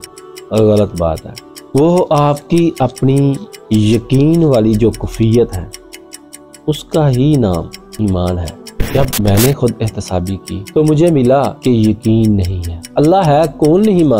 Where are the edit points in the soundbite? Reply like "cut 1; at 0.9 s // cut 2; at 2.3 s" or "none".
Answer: cut 1; at 8.8 s // cut 2; at 12.8 s